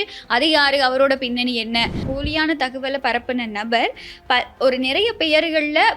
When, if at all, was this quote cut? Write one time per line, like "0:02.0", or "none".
0:02.1